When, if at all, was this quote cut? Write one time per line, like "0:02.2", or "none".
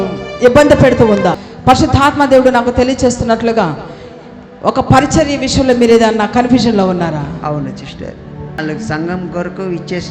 0:01.4
0:08.6